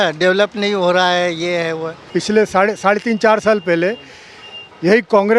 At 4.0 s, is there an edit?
no; 1 cut; at 1.9 s

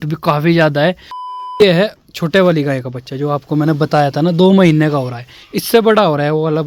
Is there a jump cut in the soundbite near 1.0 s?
yes; 1 cut; at 1.0 s

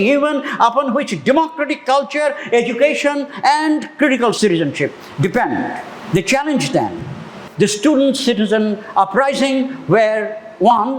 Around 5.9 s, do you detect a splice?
no; 2 cuts; at 4.4 s, 7.2 s

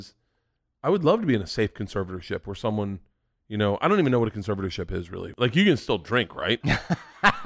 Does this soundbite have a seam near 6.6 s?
yes; 2 cuts; at 5.2 s, 6.6 s

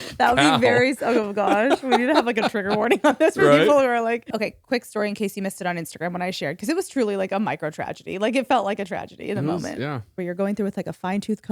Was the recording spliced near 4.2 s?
yes; 2 cuts; at 4.2 s, 10.1 s

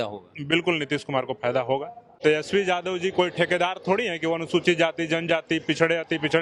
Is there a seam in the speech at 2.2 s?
yes; 1 cut; at 2.2 s

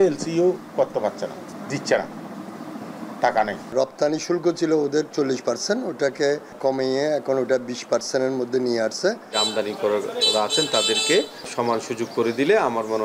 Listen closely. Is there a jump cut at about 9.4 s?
yes; 5 cuts; at 1.5 s, 3.7 s, 6.5 s, 9.4 s, 11.5 s

